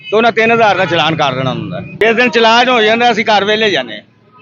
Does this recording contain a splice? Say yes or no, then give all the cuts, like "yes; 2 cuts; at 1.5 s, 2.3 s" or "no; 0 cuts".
yes; 1 cut; at 1.9 s